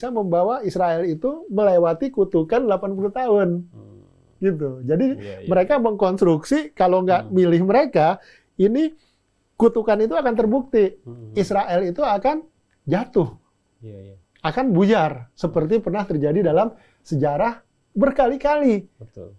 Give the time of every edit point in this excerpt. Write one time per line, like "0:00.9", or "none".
none